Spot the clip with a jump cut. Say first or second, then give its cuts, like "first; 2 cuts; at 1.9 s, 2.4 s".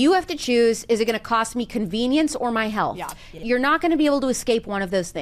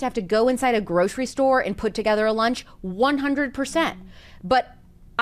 first; 1 cut; at 3.3 s